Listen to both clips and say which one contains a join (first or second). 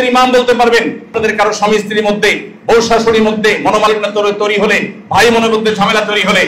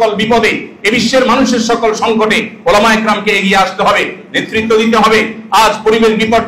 first